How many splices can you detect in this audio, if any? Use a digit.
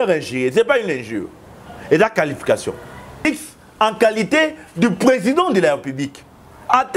1